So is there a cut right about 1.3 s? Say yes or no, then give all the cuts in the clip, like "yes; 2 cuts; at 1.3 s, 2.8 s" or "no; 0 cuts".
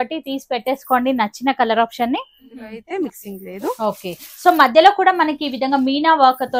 no; 1 cut; at 2.8 s